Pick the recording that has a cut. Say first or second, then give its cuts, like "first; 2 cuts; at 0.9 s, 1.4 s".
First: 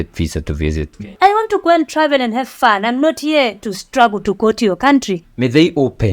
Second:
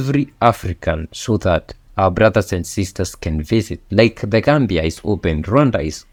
first; 2 cuts; at 1.1 s, 5.2 s